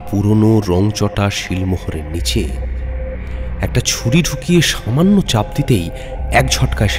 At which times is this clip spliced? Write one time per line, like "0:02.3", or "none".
none